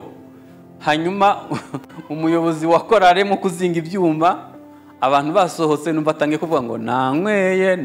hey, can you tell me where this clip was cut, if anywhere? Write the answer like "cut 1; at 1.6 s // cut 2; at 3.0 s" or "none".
none